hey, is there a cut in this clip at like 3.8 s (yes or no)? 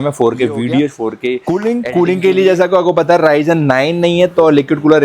no